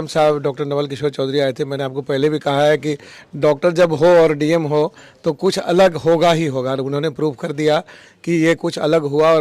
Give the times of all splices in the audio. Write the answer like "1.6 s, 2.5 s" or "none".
none